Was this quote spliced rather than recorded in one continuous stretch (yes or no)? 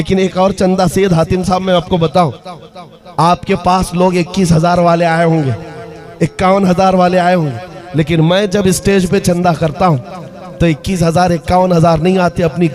no